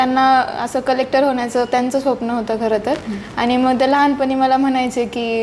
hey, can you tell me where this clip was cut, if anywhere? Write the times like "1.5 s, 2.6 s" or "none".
none